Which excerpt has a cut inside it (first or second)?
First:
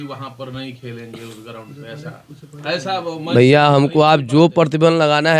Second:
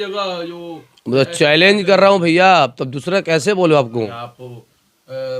second